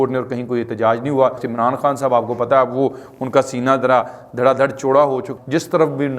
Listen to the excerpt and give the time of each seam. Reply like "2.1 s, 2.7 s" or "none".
1.4 s, 5.3 s